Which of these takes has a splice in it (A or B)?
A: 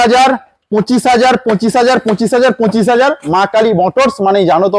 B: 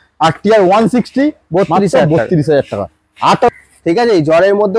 B